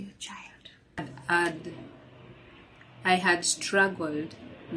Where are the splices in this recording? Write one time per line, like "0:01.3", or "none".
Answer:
0:01.0